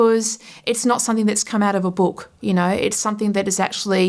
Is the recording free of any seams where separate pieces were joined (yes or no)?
yes